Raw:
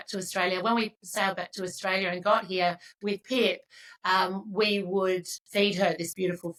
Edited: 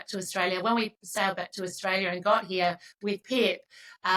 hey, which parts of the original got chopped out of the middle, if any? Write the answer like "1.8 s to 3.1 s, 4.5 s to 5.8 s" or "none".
none